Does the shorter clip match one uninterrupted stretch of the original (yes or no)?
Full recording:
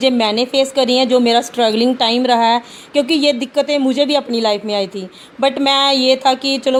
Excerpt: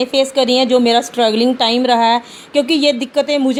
yes